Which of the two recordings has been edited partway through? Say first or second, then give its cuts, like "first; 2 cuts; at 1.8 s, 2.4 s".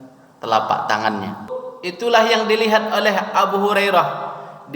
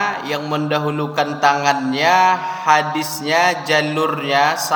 first; 1 cut; at 1.5 s